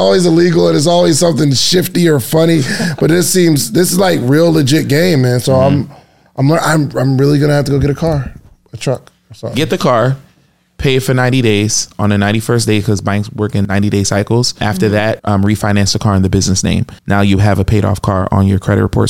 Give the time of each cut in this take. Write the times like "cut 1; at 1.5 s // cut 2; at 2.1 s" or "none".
cut 1; at 13.6 s // cut 2; at 15.0 s // cut 3; at 16.9 s